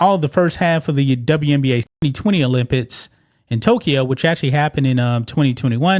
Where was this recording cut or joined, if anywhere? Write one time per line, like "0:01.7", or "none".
0:01.9